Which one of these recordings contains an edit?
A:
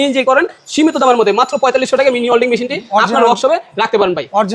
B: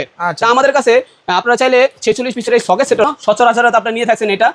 B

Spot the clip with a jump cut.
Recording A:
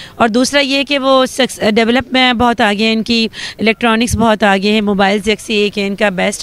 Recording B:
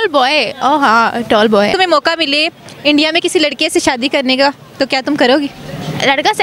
B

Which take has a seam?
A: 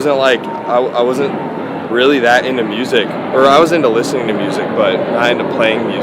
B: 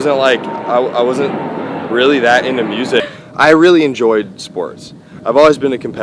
B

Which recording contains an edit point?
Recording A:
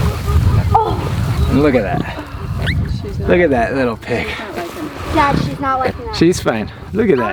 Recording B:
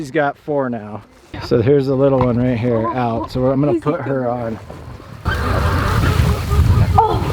B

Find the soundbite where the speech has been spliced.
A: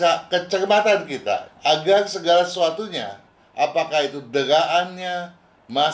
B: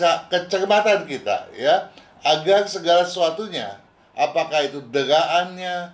A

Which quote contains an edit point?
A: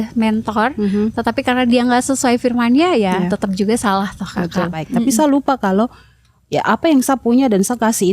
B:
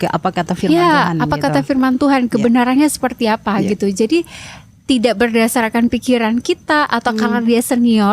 A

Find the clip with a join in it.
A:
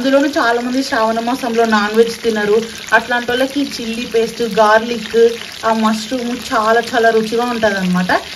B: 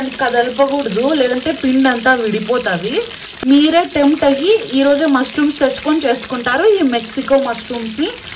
B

